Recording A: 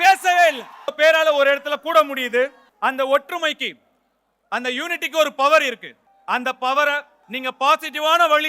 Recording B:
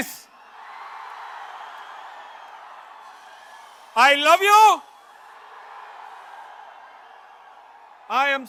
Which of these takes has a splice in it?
A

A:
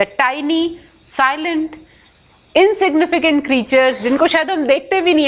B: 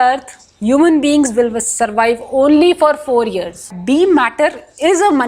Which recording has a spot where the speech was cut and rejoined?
B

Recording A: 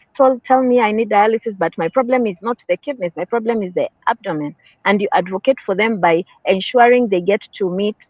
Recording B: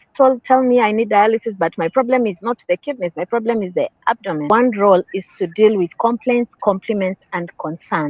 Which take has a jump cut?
B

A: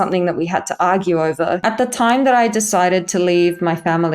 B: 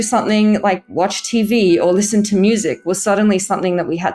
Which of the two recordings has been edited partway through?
A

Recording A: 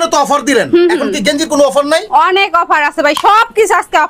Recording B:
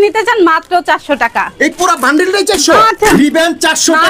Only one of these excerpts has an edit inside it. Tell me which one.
B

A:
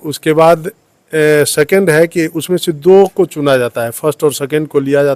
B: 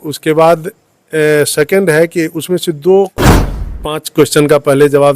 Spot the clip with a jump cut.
B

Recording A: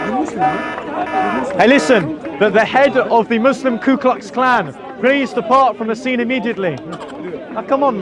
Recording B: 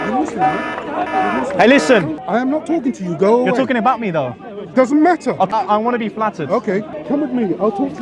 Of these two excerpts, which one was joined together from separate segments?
B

